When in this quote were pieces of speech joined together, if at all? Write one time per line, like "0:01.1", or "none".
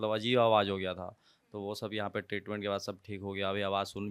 none